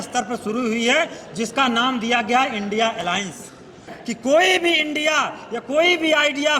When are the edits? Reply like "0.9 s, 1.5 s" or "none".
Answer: 3.9 s